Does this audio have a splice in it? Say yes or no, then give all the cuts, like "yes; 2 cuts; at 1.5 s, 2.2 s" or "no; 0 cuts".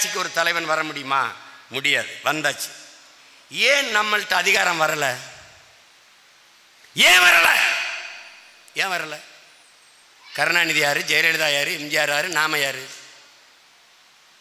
no; 0 cuts